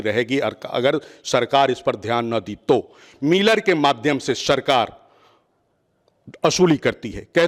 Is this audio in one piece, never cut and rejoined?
yes; 0 cuts

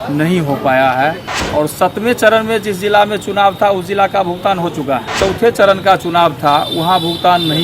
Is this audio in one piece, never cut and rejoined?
no; 2 cuts; at 1.3 s, 5.1 s

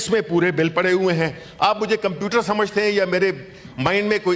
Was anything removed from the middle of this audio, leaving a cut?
no; 0 cuts

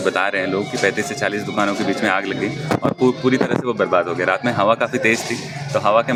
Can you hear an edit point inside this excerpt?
no; 0 cuts

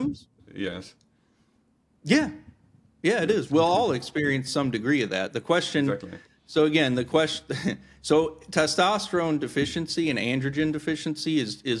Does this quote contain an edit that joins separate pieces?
no; 0 cuts

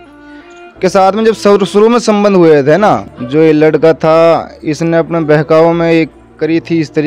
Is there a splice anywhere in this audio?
yes; 1 cut; at 3.1 s

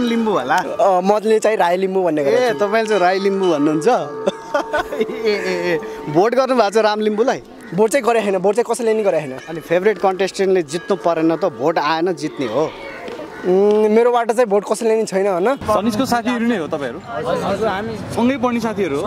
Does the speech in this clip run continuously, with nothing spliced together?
yes; 0 cuts

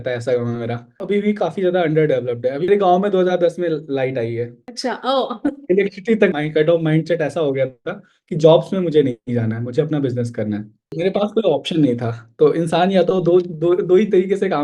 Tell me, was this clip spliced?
yes; 5 cuts; at 1.0 s, 2.7 s, 4.7 s, 6.3 s, 10.9 s

